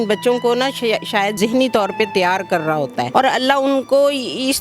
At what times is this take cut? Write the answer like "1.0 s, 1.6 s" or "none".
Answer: 1.3 s, 3.1 s